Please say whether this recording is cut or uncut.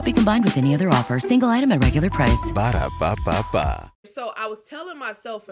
cut